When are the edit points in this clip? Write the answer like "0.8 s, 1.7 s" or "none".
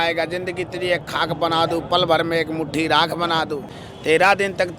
3.7 s